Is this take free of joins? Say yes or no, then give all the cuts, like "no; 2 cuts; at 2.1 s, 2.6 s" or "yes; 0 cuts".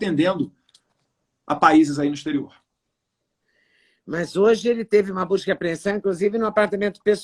yes; 0 cuts